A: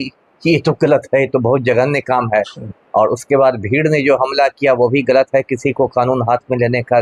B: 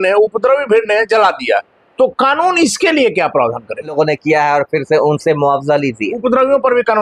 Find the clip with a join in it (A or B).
B